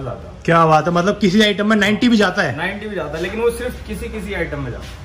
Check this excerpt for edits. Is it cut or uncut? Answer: uncut